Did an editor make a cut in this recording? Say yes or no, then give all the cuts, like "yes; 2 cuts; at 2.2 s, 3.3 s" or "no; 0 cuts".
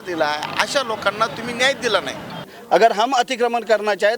yes; 1 cut; at 2.5 s